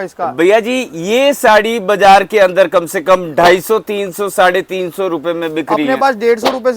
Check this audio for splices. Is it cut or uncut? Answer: uncut